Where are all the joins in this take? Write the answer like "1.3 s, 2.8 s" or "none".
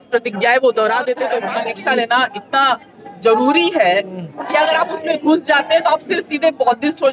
1.4 s